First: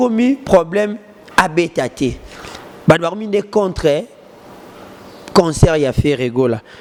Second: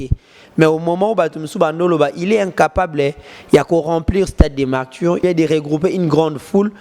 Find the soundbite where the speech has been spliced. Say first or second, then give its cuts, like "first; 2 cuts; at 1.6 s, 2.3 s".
second; 1 cut; at 5.2 s